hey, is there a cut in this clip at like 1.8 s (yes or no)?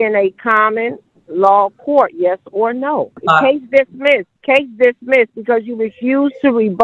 no